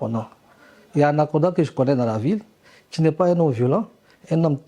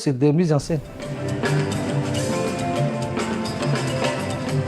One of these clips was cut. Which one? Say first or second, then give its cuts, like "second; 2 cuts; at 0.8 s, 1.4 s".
second; 1 cut; at 1.3 s